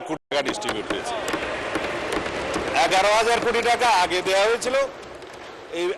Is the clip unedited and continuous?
yes; 0 cuts

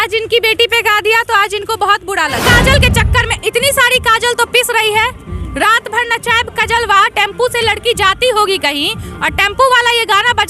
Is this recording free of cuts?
no; 1 cut; at 2.4 s

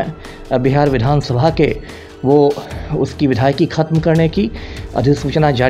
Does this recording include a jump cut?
no; 0 cuts

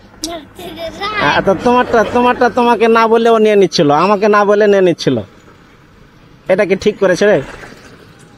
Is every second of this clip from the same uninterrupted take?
yes; 0 cuts

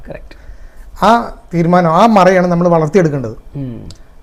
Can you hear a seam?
no; 0 cuts

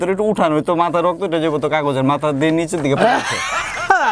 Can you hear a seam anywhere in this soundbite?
no; 0 cuts

